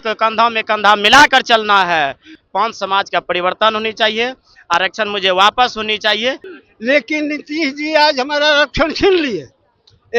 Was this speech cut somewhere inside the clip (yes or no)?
yes